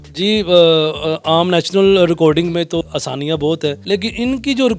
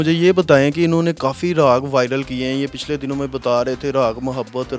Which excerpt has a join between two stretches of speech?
first; 2 cuts; at 2.8 s, 3.8 s

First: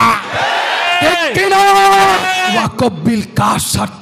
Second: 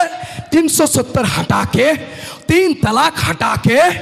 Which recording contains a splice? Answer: first; 1 cut; at 2.6 s

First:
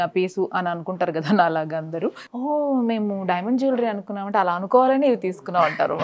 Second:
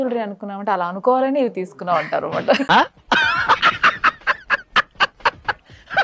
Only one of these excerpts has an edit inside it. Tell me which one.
first; 1 cut; at 2.3 s

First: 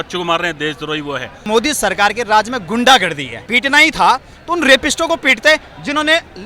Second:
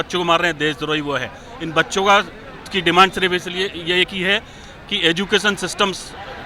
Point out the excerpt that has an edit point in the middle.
first; 2 cuts; at 1.5 s, 3.5 s

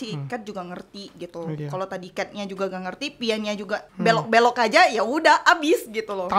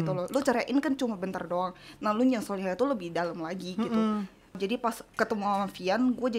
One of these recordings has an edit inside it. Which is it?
second; 1 cut; at 4.6 s

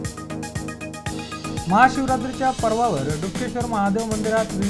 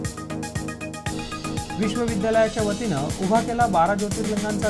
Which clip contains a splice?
second; 1 cut; at 1.6 s

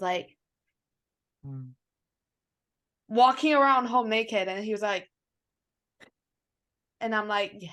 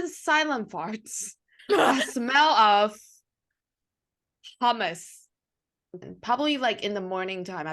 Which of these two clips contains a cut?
second; 1 cut; at 6.0 s

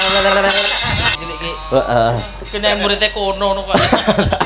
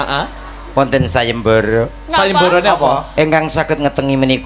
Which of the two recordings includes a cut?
first; 1 cut; at 1.2 s

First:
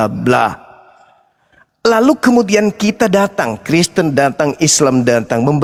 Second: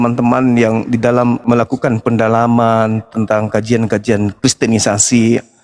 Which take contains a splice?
second; 2 cuts; at 1.4 s, 4.3 s

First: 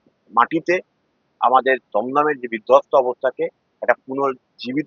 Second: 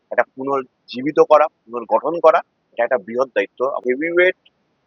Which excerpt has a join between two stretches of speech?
second; 1 cut; at 3.8 s

